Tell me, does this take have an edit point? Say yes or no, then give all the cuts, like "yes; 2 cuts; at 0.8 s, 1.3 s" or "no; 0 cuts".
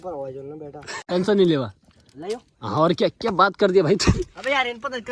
yes; 1 cut; at 1.0 s